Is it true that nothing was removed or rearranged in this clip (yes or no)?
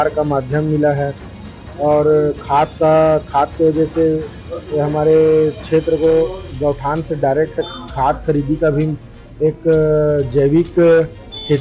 yes